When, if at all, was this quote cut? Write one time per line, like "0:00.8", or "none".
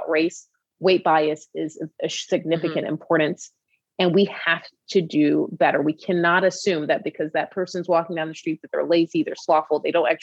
none